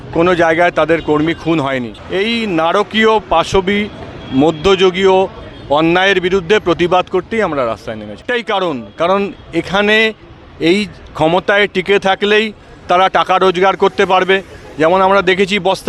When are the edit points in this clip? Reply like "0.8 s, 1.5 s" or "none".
2.0 s, 8.2 s